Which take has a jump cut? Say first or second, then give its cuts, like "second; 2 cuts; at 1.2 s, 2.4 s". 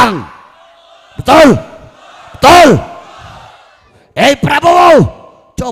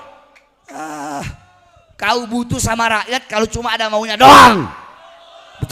first; 1 cut; at 4.0 s